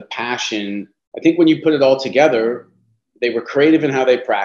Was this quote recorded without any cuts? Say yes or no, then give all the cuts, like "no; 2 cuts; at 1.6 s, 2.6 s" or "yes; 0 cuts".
no; 1 cut; at 1.0 s